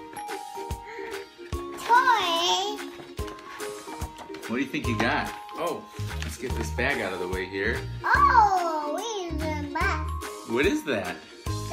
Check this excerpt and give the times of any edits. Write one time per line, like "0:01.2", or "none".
none